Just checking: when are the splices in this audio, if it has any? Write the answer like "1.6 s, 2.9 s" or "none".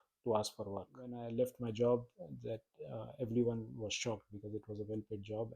1.2 s